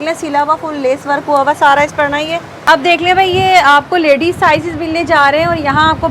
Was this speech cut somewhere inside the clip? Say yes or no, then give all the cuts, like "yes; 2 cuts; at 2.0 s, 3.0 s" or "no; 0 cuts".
yes; 1 cut; at 2.6 s